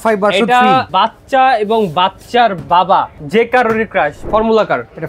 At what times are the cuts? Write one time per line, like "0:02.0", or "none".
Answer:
0:00.9
0:03.2
0:04.2